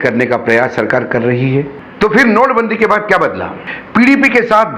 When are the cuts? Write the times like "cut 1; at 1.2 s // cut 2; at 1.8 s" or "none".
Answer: cut 1; at 1.8 s